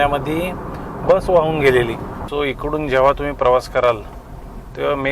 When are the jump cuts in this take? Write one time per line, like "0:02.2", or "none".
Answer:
0:02.1